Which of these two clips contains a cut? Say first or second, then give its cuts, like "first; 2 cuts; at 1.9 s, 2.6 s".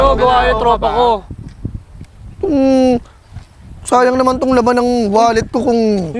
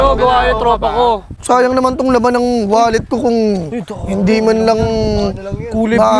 second; 1 cut; at 1.3 s